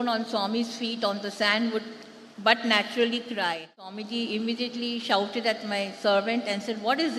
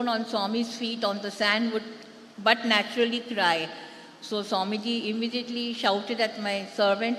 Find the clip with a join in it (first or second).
first